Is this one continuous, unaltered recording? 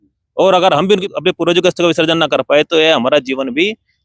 no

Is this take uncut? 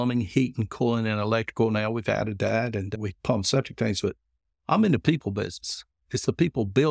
yes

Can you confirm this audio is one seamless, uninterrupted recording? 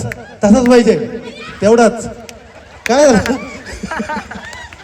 yes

